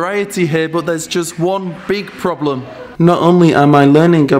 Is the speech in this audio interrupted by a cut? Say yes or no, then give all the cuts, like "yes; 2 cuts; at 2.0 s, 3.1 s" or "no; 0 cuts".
yes; 1 cut; at 2.8 s